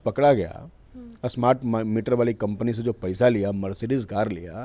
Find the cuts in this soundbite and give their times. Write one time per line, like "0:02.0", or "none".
none